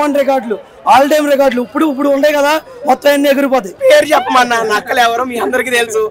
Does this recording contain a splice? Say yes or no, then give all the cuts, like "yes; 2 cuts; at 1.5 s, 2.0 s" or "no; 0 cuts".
yes; 1 cut; at 3.8 s